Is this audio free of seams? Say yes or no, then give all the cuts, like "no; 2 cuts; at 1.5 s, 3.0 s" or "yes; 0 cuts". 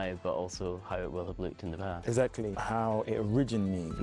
no; 1 cut; at 2.5 s